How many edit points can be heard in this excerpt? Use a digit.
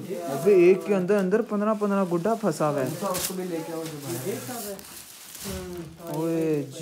0